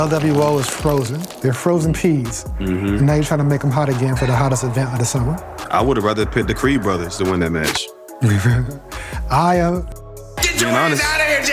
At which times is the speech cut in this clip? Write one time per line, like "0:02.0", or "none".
none